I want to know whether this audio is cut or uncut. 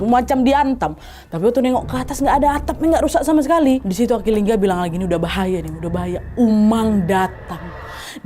cut